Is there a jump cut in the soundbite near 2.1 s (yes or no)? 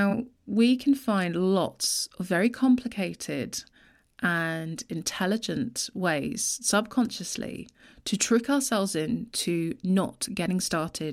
no